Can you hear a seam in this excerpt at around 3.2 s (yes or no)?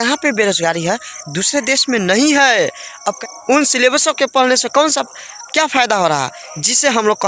yes